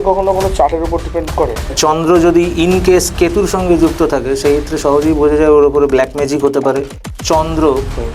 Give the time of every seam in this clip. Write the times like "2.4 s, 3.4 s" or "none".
1.7 s, 6.9 s